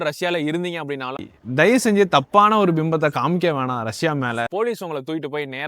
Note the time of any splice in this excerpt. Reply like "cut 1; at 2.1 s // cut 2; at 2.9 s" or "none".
cut 1; at 1.2 s // cut 2; at 4.5 s

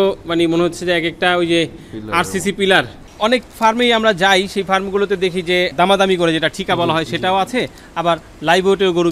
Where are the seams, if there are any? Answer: cut 1; at 3.0 s

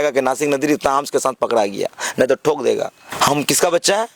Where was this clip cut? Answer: cut 1; at 3.0 s

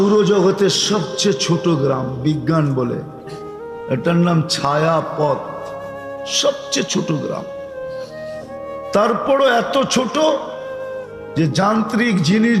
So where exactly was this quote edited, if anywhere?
none

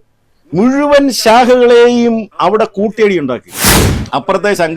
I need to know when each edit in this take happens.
cut 1; at 3.7 s

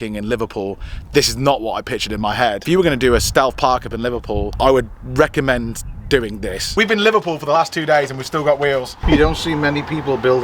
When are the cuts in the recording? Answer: cut 1; at 2.6 s // cut 2; at 4.5 s // cut 3; at 6.6 s // cut 4; at 8.9 s

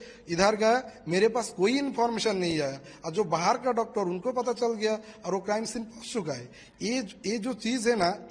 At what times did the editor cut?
none

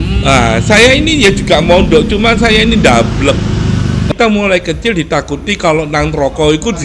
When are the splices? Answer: cut 1; at 4.1 s

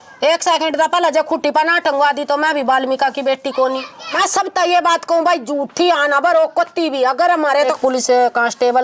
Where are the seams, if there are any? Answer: cut 1; at 4.2 s // cut 2; at 7.7 s

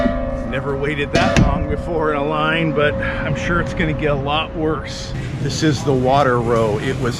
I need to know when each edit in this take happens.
cut 1; at 5.2 s

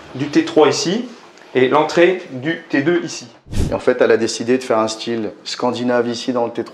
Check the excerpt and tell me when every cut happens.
cut 1; at 3.6 s

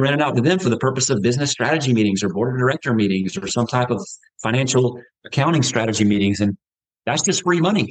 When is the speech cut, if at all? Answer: none

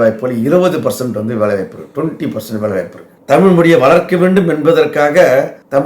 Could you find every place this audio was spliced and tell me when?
cut 1; at 3.0 s

